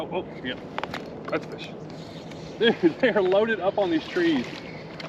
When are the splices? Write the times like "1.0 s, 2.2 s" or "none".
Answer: none